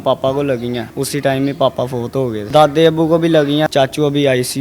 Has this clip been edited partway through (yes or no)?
yes